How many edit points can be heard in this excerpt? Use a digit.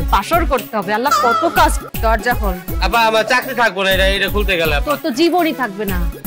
1